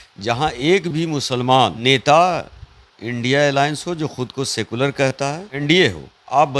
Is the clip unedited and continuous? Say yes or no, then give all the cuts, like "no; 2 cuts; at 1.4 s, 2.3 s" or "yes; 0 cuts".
no; 2 cuts; at 1.8 s, 5.6 s